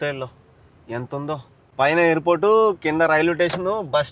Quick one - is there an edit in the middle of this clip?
yes; 1 cut; at 1.6 s

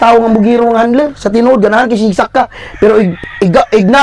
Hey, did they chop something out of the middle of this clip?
no; 0 cuts

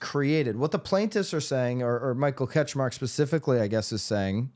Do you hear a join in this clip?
no; 0 cuts

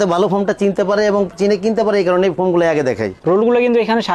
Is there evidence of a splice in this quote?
yes; 1 cut; at 3.2 s

